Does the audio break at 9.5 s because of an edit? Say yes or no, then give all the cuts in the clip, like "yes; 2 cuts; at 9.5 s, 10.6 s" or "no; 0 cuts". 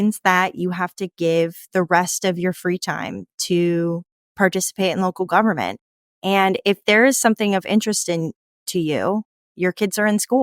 yes; 1 cut; at 9.5 s